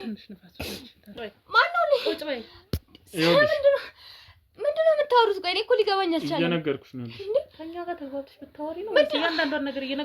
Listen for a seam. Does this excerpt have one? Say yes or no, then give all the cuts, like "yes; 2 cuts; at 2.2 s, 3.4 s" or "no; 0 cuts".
yes; 1 cut; at 1.2 s